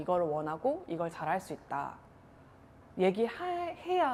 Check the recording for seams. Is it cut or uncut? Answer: uncut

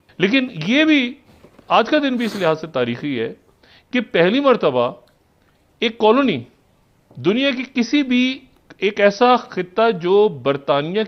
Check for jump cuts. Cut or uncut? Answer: uncut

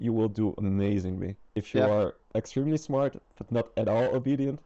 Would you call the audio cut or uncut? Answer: cut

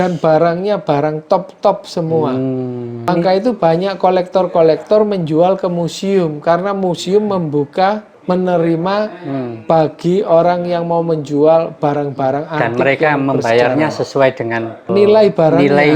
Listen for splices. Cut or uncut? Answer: cut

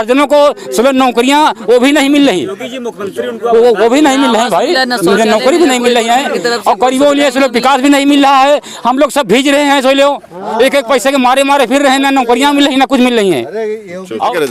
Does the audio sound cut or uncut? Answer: uncut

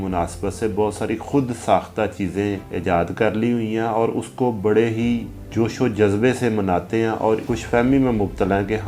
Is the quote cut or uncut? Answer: cut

